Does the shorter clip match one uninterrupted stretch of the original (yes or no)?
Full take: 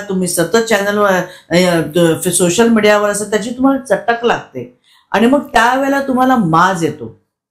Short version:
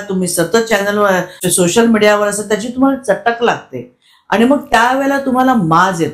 no